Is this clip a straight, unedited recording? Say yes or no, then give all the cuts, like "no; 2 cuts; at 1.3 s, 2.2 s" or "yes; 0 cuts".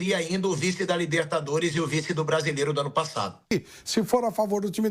no; 1 cut; at 3.5 s